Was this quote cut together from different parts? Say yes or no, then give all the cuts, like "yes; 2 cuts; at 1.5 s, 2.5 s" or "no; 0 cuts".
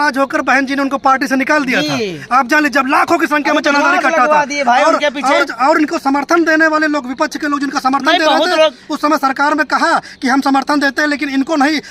no; 0 cuts